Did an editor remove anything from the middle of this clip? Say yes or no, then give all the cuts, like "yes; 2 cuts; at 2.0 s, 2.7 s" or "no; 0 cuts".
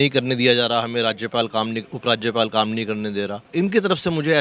yes; 1 cut; at 3.4 s